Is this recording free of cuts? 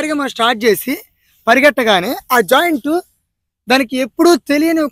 yes; 0 cuts

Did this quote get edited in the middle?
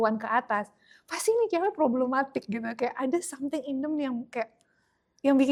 no; 0 cuts

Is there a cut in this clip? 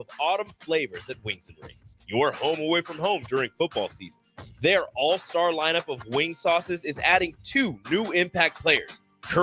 no; 0 cuts

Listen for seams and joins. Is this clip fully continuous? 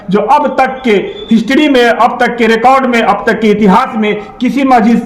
yes; 0 cuts

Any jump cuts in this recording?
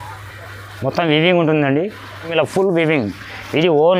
yes; 1 cut; at 2.2 s

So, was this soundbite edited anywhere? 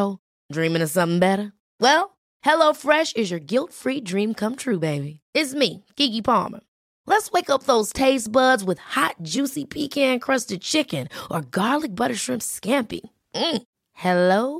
no; 0 cuts

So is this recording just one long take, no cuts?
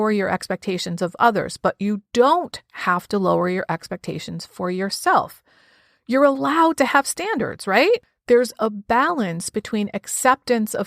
no; 1 cut; at 8.1 s

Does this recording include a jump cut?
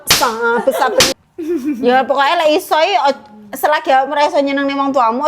yes; 1 cut; at 1.1 s

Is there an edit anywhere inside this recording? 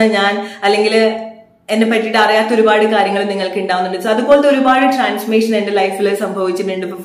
no; 0 cuts

